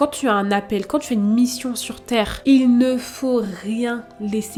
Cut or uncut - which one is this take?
uncut